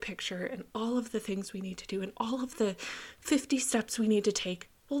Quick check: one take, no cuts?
yes; 0 cuts

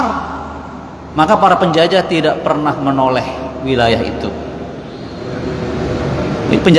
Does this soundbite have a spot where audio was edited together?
no; 0 cuts

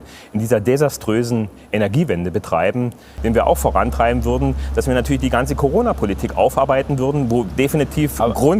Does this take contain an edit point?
yes; 1 cut; at 3.1 s

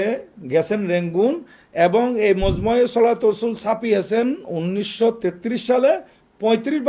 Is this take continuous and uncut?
yes; 0 cuts

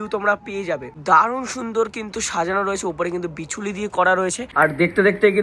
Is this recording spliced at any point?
yes; 2 cuts; at 0.9 s, 4.4 s

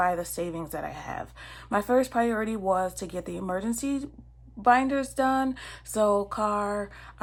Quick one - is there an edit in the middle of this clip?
no; 0 cuts

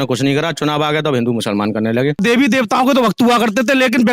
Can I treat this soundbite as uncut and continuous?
no; 1 cut; at 2.2 s

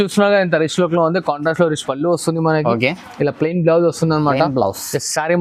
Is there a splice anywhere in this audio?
no; 0 cuts

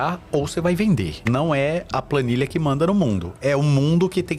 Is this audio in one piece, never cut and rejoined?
no; 1 cut; at 1.2 s

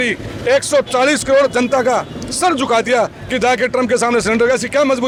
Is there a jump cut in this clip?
no; 0 cuts

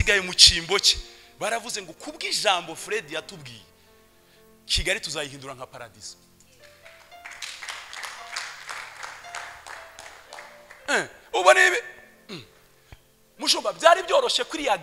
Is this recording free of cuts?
yes; 0 cuts

